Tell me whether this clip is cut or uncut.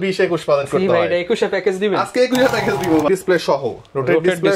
cut